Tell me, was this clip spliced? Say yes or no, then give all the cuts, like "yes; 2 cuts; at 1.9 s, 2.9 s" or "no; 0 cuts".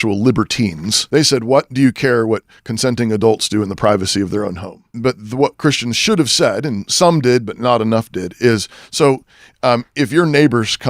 yes; 2 cuts; at 0.9 s, 4.6 s